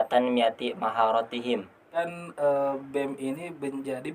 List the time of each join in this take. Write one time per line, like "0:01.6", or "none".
0:02.0